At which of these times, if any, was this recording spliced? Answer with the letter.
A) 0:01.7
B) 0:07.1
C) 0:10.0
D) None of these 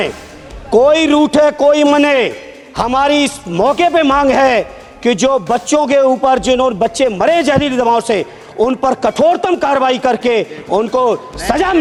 D